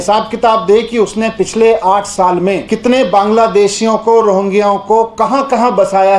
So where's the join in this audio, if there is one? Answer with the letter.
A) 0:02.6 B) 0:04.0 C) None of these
A